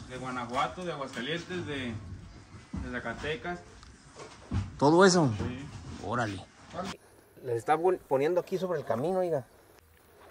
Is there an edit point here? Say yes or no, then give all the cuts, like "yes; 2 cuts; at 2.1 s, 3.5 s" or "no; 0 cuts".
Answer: yes; 1 cut; at 7.0 s